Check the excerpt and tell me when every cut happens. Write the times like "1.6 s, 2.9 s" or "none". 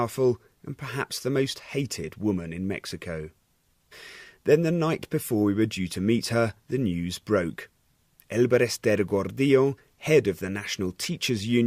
3.3 s